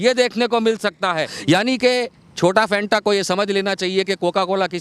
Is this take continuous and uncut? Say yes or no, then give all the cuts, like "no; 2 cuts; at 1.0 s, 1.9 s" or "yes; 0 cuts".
no; 1 cut; at 1.3 s